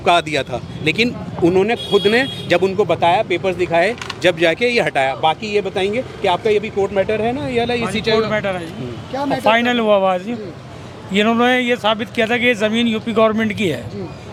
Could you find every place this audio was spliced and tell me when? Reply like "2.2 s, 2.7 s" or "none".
none